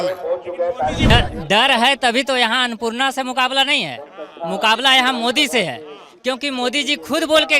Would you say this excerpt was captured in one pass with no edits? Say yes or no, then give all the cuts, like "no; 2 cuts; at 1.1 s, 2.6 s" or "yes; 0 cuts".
no; 1 cut; at 1.1 s